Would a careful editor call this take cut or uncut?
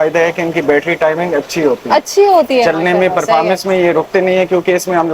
uncut